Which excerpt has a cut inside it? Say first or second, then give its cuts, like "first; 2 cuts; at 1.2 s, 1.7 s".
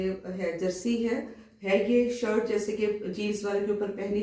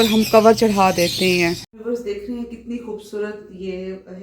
second; 1 cut; at 1.7 s